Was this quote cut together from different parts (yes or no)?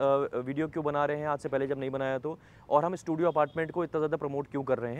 no